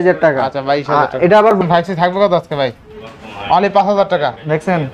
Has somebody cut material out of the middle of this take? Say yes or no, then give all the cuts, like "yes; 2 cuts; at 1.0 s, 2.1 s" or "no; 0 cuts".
yes; 1 cut; at 1.6 s